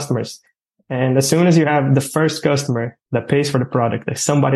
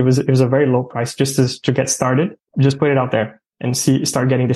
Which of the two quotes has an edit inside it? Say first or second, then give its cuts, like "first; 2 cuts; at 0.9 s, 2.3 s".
second; 1 cut; at 2.4 s